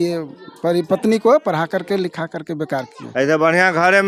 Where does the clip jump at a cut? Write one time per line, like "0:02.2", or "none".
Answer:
none